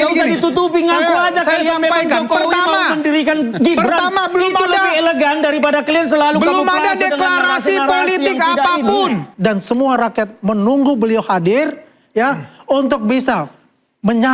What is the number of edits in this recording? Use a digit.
1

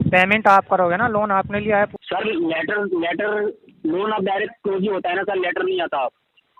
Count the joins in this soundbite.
1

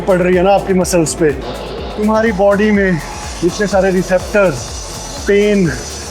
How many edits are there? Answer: 1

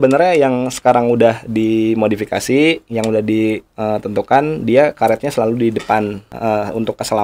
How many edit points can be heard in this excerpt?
1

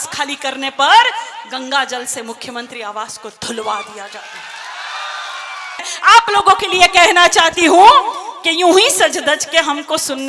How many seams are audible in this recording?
1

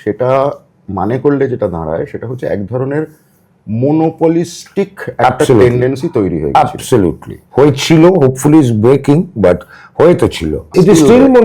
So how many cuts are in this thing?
0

